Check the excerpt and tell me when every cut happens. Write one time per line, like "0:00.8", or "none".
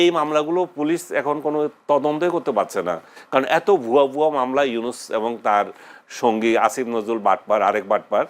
none